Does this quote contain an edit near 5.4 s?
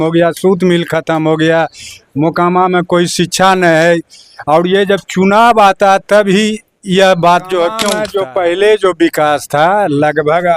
no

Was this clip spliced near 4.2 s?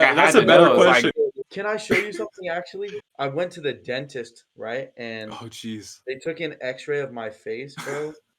no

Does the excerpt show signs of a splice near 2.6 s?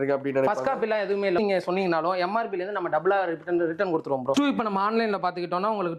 no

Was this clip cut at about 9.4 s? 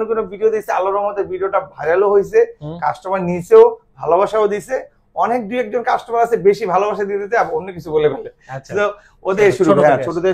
yes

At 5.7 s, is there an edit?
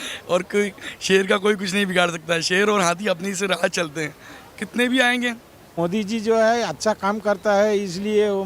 yes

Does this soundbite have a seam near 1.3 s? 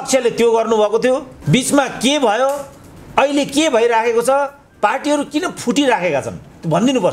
yes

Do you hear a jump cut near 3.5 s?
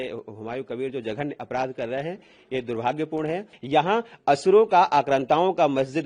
yes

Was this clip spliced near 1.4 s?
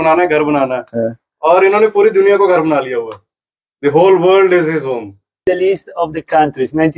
no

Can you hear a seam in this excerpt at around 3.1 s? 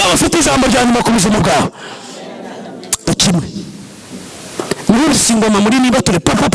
yes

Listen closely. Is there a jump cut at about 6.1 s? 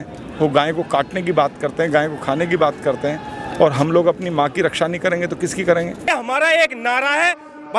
yes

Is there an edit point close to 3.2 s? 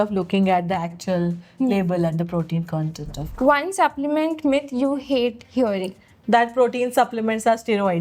yes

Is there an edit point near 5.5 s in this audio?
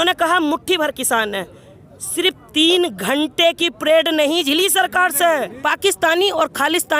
yes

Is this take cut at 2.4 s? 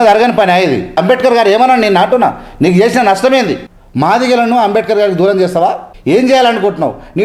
no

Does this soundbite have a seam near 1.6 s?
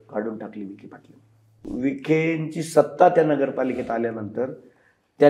yes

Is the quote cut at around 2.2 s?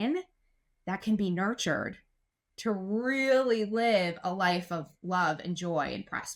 no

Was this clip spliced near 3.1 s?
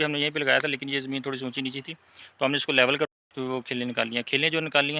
yes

